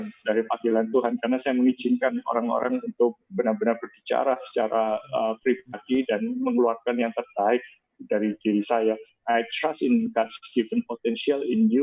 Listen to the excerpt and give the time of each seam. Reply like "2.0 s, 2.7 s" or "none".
9.1 s